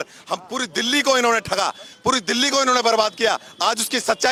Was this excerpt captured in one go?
yes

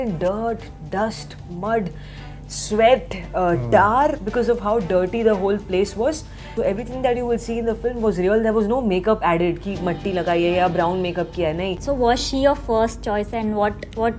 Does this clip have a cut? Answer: yes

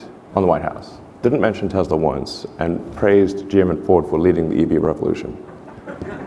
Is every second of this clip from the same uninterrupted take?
no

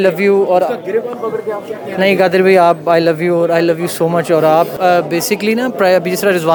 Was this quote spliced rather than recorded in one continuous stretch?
no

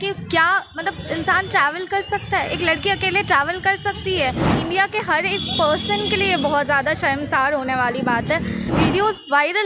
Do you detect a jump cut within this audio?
yes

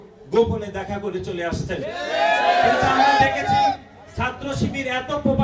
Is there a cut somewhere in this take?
no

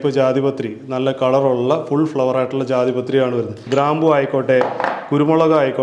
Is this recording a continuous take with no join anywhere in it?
no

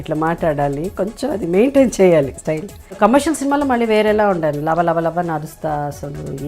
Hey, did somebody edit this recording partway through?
yes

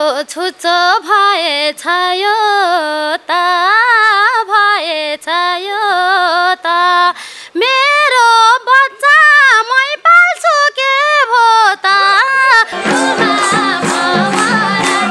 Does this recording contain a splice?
no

